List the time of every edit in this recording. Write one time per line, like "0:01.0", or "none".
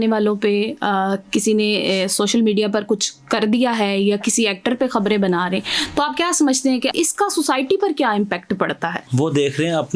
0:06.9
0:09.1